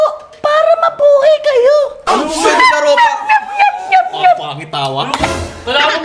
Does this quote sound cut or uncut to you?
uncut